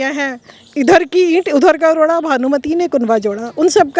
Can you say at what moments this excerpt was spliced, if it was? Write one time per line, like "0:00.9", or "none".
none